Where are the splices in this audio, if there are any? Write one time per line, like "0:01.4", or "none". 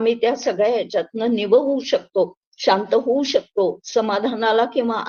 none